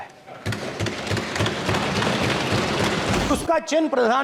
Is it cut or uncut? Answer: cut